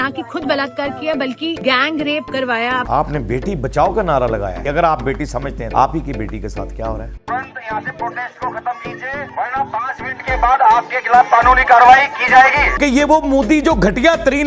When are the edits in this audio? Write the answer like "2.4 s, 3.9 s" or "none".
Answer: 2.9 s, 4.6 s, 5.6 s, 7.3 s, 12.8 s